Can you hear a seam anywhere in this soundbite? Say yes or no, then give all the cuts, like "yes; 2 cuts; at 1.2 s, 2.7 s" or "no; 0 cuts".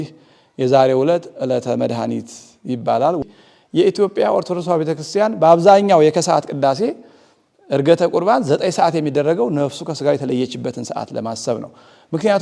yes; 1 cut; at 3.2 s